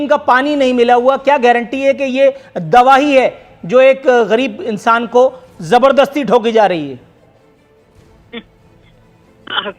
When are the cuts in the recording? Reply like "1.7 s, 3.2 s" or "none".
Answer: none